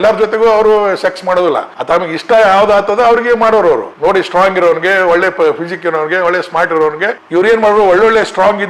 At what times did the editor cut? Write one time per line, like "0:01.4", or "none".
0:01.7
0:03.9
0:07.2